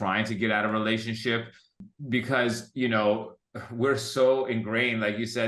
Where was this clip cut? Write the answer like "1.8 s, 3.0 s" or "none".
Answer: 1.8 s